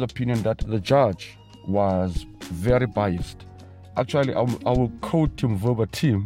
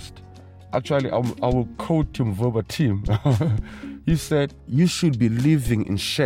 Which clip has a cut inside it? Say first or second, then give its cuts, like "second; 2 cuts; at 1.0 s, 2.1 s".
second; 1 cut; at 4.6 s